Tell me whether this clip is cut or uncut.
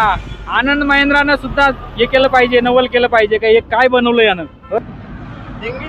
cut